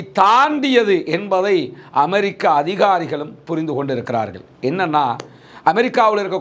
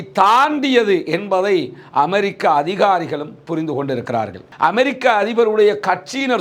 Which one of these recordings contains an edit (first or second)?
second